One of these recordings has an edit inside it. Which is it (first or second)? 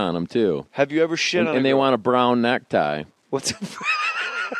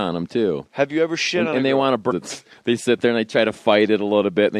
first